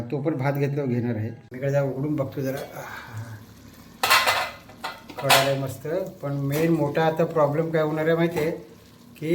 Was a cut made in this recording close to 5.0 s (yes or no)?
no